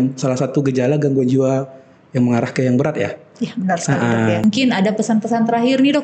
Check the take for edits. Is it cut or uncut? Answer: cut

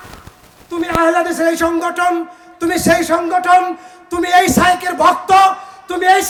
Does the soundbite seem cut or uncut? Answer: uncut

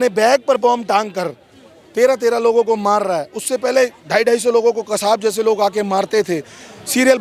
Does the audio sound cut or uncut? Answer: uncut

